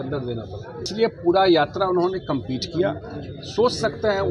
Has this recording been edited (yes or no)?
yes